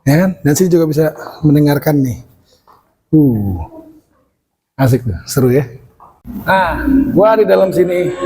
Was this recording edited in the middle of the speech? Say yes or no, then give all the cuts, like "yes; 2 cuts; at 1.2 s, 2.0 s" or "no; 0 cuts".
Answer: yes; 1 cut; at 6.3 s